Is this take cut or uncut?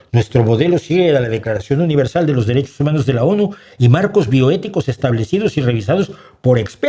uncut